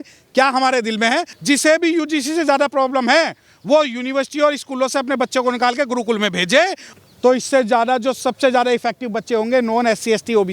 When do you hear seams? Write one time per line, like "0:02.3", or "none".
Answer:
0:01.3
0:06.8